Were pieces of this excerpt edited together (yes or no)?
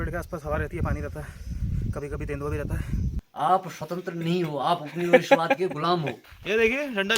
yes